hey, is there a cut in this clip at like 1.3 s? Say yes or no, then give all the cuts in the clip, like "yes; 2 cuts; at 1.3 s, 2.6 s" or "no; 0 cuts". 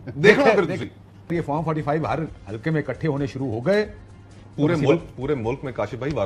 yes; 1 cut; at 1.3 s